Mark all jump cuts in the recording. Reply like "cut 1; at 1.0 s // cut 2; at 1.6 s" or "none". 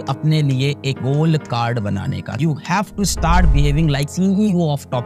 cut 1; at 2.4 s